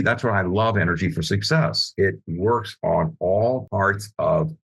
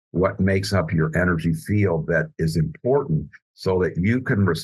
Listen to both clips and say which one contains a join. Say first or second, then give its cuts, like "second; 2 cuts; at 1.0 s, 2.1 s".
first; 2 cuts; at 1.8 s, 3.7 s